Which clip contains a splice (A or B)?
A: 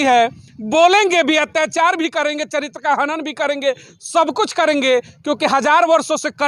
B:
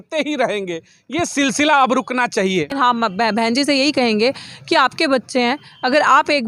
B